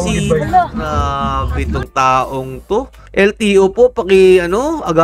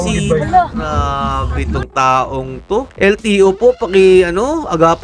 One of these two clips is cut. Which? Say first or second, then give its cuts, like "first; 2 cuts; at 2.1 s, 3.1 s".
second; 1 cut; at 2.9 s